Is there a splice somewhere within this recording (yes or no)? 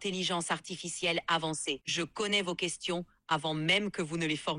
no